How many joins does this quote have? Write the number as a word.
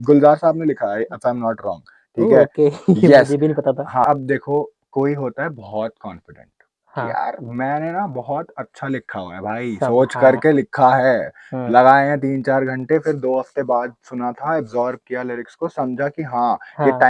one